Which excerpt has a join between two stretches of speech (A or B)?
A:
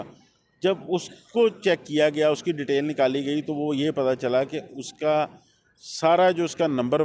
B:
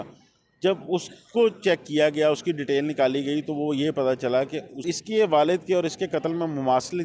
B